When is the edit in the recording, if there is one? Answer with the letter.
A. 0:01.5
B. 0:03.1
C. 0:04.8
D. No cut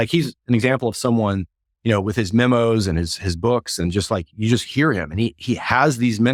D